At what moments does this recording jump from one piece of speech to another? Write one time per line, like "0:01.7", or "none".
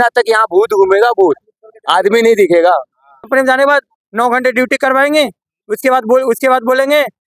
0:03.3